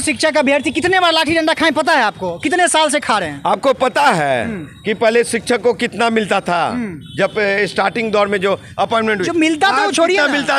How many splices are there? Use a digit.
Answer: 0